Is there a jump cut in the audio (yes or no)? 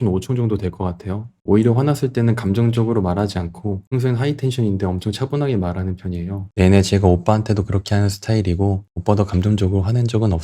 yes